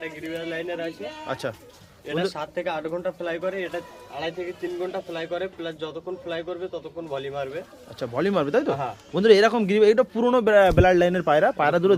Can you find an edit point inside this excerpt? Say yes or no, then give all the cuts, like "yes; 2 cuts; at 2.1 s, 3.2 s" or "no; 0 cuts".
no; 0 cuts